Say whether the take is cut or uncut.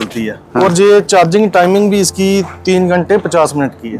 uncut